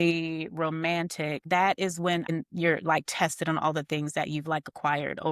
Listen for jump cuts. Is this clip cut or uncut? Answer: cut